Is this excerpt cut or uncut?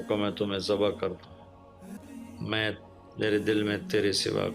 cut